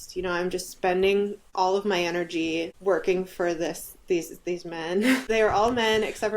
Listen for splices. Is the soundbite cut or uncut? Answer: cut